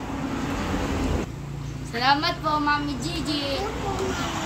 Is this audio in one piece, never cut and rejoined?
no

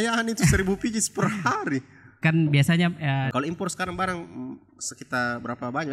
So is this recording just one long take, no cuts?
no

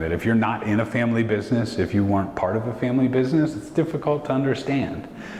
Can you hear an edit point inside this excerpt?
no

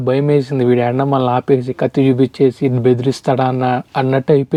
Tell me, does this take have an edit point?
no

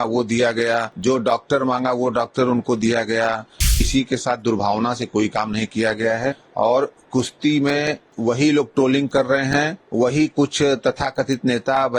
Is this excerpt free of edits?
no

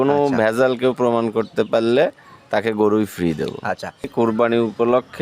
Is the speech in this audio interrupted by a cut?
yes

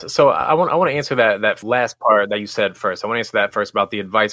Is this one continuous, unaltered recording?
no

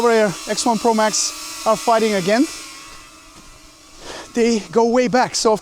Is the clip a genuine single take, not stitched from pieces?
yes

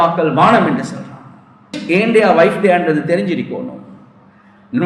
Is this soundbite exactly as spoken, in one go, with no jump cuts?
no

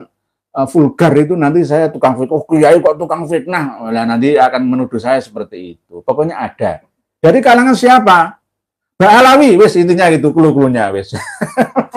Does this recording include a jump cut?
no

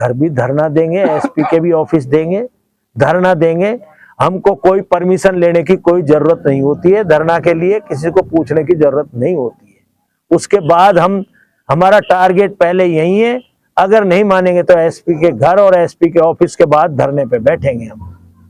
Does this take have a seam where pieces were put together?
no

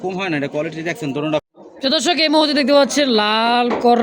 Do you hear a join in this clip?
yes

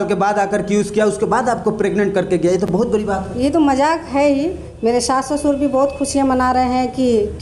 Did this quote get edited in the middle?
no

